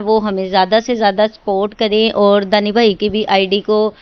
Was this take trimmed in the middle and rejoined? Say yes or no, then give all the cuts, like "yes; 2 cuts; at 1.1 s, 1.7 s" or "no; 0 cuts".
no; 0 cuts